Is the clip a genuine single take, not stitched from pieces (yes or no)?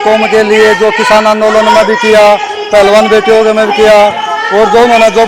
yes